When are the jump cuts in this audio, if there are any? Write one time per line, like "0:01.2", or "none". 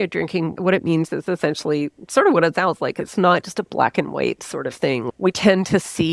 none